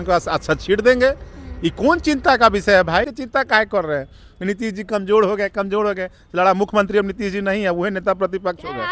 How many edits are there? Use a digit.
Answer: 1